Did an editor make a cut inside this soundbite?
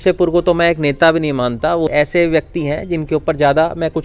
yes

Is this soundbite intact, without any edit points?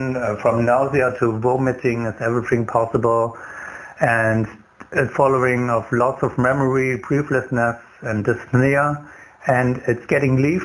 yes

